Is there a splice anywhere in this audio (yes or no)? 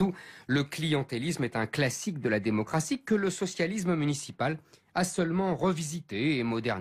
no